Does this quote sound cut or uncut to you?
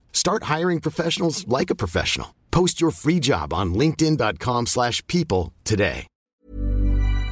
cut